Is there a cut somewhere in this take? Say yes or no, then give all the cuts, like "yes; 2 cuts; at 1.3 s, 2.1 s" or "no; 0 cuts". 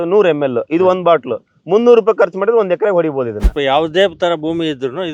yes; 1 cut; at 3.5 s